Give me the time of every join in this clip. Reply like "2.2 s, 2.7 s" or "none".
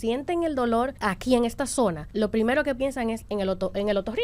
1.0 s, 2.0 s